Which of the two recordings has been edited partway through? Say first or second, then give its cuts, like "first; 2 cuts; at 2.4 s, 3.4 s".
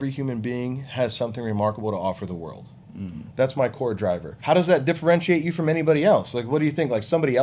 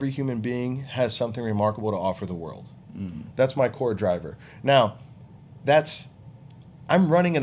first; 1 cut; at 4.3 s